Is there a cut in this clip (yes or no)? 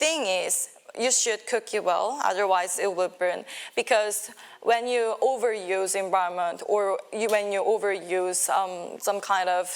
no